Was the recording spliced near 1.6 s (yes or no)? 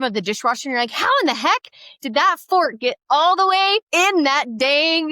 no